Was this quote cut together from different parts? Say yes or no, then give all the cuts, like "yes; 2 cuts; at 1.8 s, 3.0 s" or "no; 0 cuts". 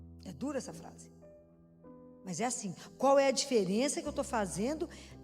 yes; 2 cuts; at 0.9 s, 2.2 s